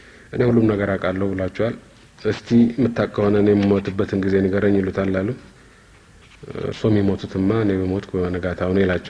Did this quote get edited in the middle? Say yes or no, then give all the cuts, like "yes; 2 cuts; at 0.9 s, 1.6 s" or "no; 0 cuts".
no; 0 cuts